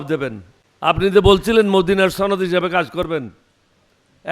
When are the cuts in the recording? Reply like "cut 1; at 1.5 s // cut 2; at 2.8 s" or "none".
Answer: cut 1; at 1.0 s